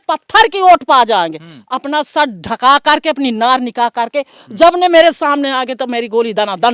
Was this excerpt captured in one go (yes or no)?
yes